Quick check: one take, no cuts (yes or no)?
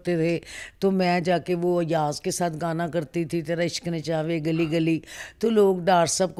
yes